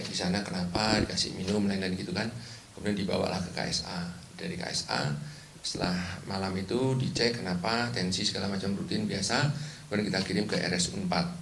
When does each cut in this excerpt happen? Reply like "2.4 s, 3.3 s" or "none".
4.6 s